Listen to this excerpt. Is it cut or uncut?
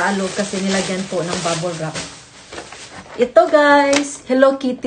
uncut